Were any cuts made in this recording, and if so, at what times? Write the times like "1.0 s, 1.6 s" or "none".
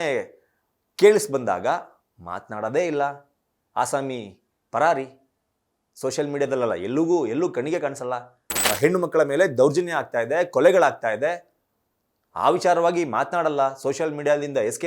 8.8 s

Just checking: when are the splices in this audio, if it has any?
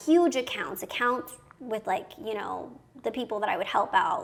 none

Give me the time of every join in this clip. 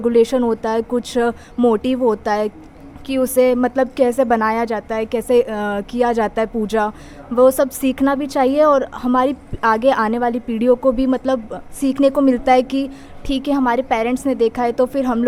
none

